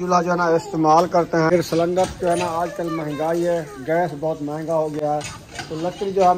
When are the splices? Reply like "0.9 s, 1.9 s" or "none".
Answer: 1.5 s

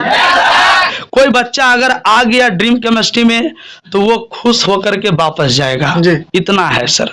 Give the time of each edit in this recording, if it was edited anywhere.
1.0 s

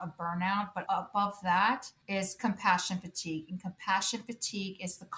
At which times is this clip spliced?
0.8 s, 1.9 s

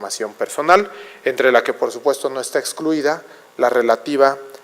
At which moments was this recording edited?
1.3 s

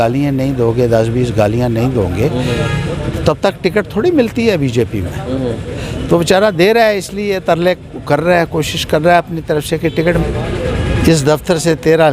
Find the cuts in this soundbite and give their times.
10.2 s

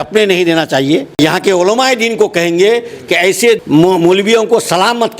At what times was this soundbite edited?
1.2 s, 3.6 s

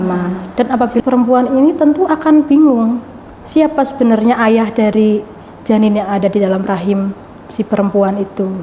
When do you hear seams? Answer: 1.0 s

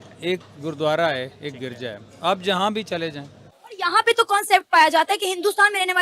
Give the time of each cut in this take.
3.6 s

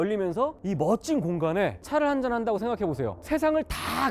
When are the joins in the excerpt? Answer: 1.8 s

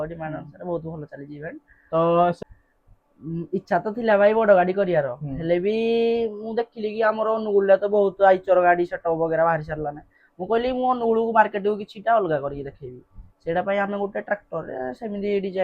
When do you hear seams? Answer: 2.4 s

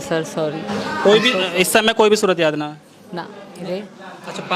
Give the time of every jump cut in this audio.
3.5 s

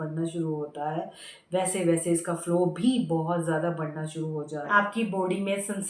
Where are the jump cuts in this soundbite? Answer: 4.7 s

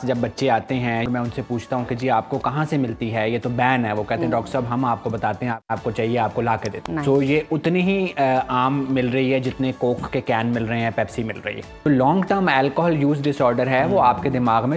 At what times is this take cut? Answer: 1.1 s, 5.6 s, 6.7 s, 11.9 s

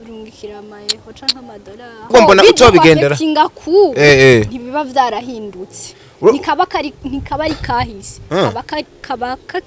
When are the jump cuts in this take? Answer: 2.1 s

